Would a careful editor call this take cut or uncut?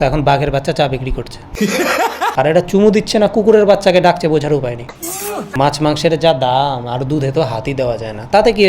cut